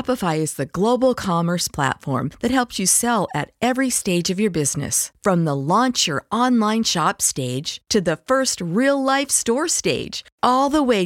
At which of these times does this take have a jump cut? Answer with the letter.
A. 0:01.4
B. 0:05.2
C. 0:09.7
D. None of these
D